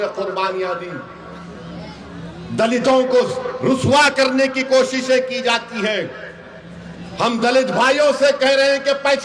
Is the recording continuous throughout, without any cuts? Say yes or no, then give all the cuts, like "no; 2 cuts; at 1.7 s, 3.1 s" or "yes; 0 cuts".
yes; 0 cuts